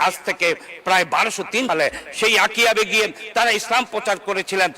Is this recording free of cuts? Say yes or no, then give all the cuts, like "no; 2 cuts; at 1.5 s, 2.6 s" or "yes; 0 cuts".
no; 1 cut; at 1.7 s